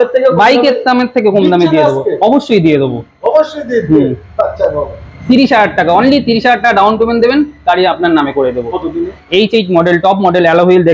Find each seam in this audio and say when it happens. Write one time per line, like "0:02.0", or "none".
0:09.2